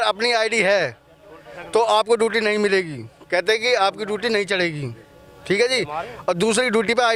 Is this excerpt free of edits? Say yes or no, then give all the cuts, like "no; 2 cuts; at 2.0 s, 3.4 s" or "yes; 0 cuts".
yes; 0 cuts